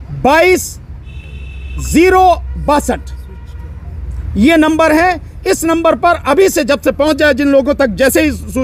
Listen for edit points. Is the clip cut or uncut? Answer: uncut